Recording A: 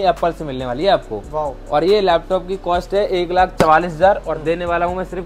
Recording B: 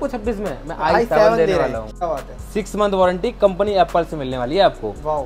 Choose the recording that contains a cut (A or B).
B